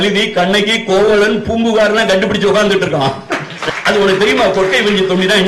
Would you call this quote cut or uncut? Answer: cut